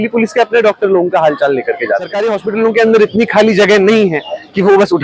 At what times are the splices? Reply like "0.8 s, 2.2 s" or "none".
2.1 s